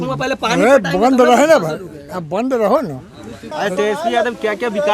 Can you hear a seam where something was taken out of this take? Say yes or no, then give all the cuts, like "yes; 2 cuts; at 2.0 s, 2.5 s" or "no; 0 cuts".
yes; 1 cut; at 3.5 s